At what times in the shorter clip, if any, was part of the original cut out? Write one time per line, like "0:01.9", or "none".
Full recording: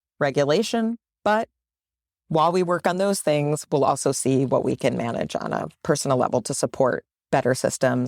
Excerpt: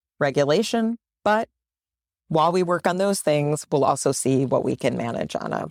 none